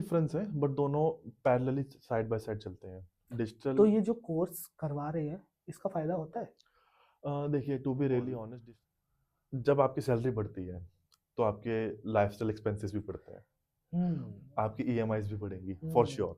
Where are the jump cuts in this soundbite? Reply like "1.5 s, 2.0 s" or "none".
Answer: 8.5 s